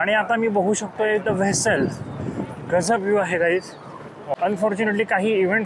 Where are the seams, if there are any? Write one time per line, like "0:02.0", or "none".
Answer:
0:04.4